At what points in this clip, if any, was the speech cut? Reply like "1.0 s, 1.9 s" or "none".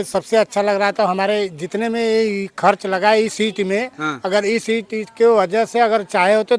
none